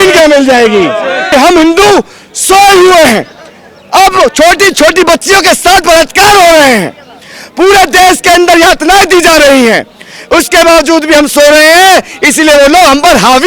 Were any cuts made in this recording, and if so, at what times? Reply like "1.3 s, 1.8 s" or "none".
1.3 s

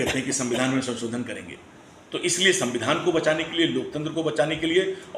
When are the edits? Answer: none

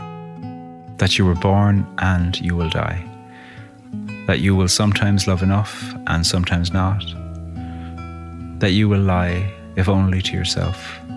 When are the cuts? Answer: 0.9 s

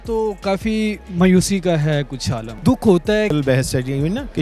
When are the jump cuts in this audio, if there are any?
2.5 s, 3.3 s

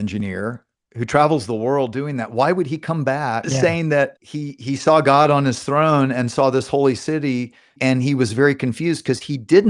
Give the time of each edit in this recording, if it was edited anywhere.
3.5 s, 4.2 s, 7.8 s

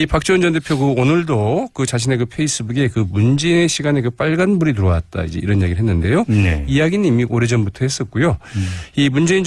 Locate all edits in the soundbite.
5.7 s

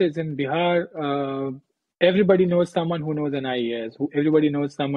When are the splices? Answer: none

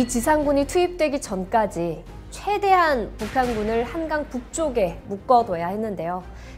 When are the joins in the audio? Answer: none

